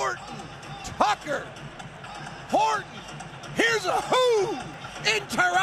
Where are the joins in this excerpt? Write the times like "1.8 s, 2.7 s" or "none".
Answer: none